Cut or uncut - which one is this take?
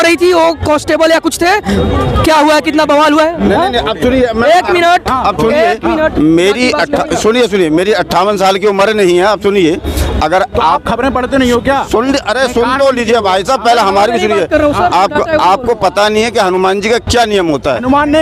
uncut